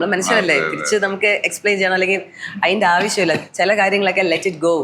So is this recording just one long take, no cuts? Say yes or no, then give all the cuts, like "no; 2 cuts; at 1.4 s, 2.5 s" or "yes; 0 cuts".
yes; 0 cuts